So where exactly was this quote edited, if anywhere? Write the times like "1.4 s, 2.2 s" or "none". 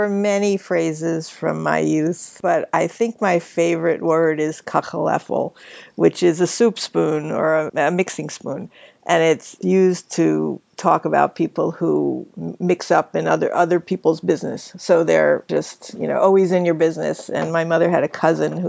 9.5 s, 15.5 s